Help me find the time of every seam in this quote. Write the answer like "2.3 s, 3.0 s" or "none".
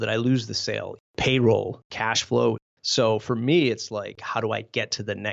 1.0 s, 1.8 s, 2.7 s, 4.2 s